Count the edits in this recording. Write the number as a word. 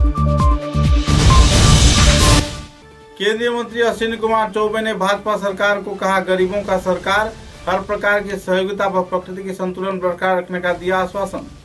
zero